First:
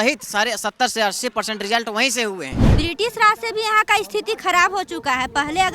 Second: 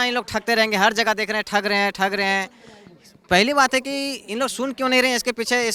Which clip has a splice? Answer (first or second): first